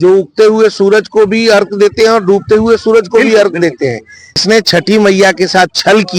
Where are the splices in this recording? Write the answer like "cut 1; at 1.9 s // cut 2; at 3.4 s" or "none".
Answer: cut 1; at 4.4 s

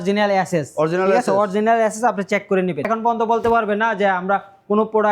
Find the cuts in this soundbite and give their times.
cut 1; at 2.9 s

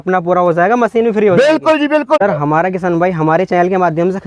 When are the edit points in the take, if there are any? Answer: cut 1; at 2.2 s

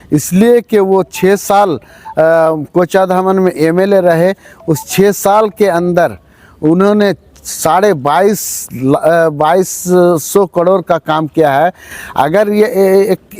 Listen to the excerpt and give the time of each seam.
none

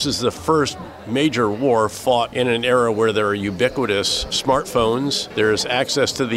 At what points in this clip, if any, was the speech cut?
cut 1; at 2.3 s // cut 2; at 4.4 s // cut 3; at 5.2 s

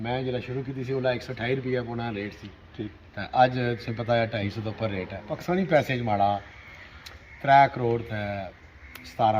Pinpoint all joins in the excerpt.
cut 1; at 5.3 s

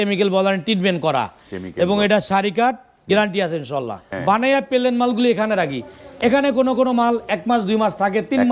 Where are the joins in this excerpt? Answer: cut 1; at 4.0 s

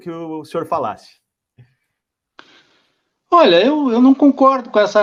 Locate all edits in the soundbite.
none

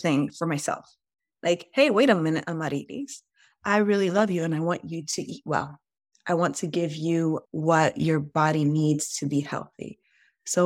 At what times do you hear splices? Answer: cut 1; at 7.5 s

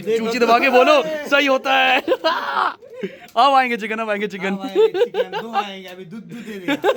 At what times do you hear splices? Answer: none

